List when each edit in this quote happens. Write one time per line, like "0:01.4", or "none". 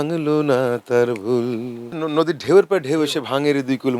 0:01.8